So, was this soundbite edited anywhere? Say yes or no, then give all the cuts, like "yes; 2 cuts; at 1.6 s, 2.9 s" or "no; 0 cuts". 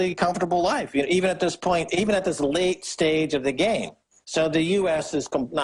yes; 1 cut; at 2.6 s